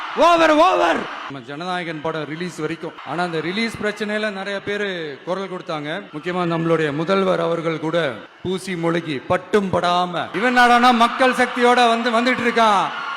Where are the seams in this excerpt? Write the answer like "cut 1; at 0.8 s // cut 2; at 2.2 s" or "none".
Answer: cut 1; at 1.3 s // cut 2; at 3.0 s // cut 3; at 6.1 s // cut 4; at 8.3 s // cut 5; at 10.2 s